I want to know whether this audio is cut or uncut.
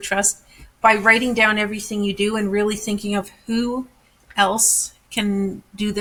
uncut